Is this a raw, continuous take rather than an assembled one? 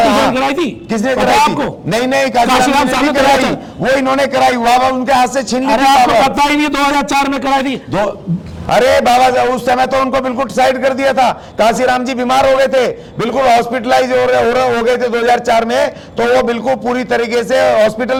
yes; 0 cuts

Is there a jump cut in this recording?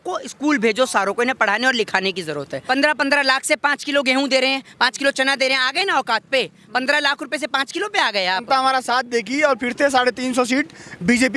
yes; 2 cuts; at 2.5 s, 8.4 s

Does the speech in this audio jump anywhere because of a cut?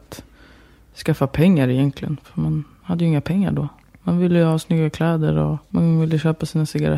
yes; 1 cut; at 5.6 s

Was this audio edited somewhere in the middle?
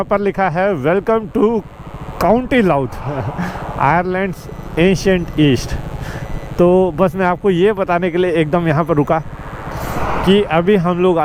no; 0 cuts

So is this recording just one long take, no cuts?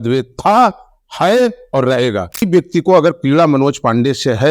no; 1 cut; at 2.5 s

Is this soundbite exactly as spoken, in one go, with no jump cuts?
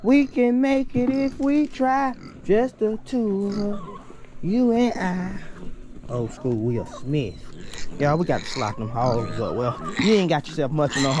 yes; 0 cuts

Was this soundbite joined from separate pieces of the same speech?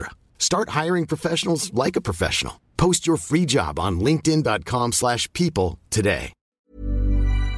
yes; 1 cut; at 6.4 s

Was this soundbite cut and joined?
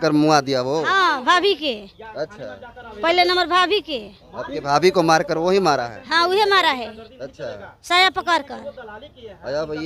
no; 0 cuts

